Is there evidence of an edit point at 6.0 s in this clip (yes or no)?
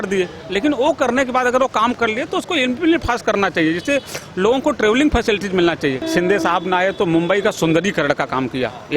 yes